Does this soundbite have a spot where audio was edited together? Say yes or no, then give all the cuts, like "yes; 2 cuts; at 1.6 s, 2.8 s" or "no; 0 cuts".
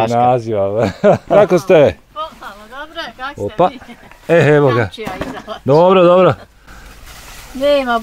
yes; 1 cut; at 1.4 s